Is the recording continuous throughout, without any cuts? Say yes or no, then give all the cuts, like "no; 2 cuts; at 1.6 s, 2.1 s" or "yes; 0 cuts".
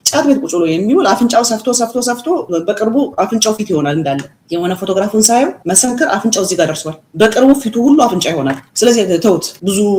yes; 0 cuts